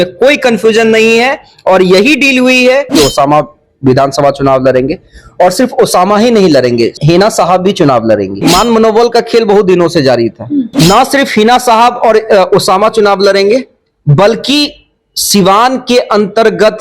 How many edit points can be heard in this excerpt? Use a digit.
3